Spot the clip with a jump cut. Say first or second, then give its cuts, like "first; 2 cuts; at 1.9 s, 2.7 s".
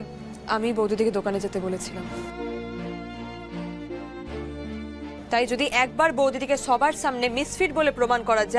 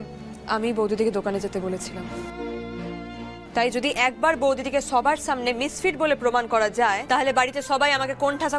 second; 2 cuts; at 3.4 s, 7.0 s